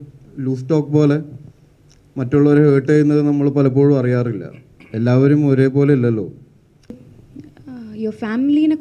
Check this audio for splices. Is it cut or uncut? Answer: cut